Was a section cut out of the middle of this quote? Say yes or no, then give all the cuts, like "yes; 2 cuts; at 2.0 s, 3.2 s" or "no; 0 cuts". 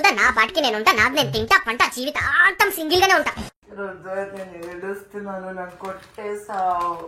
yes; 1 cut; at 3.6 s